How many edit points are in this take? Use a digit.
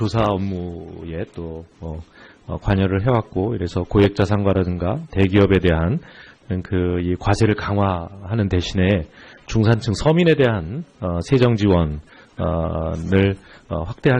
1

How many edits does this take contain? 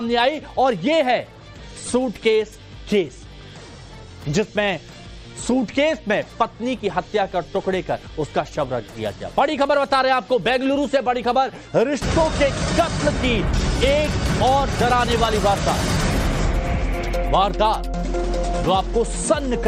0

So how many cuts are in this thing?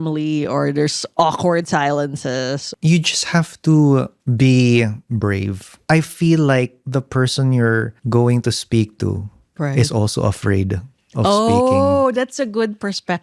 5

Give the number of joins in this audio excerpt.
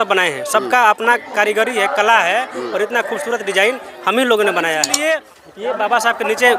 1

